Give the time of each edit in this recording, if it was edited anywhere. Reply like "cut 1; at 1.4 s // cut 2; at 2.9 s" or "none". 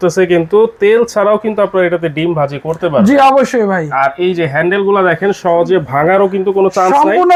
none